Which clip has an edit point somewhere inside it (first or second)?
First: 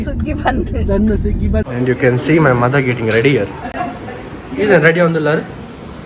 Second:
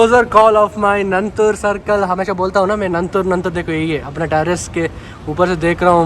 first